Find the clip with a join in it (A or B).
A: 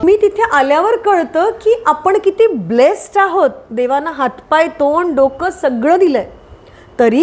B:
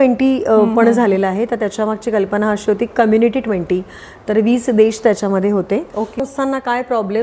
B